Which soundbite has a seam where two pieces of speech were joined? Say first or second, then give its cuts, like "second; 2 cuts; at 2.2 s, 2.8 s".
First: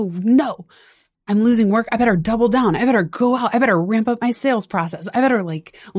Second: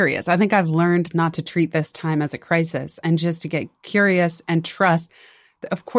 second; 1 cut; at 5.0 s